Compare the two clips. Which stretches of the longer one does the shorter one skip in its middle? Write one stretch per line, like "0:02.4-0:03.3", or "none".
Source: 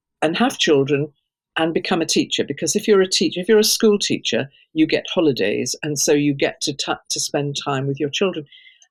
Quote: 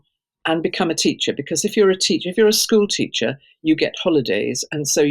none